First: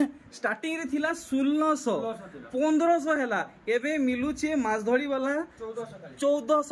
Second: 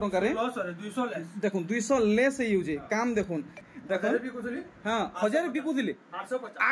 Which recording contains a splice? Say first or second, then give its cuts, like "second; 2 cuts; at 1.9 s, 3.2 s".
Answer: second; 1 cut; at 3.6 s